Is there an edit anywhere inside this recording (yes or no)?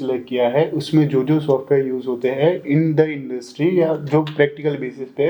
no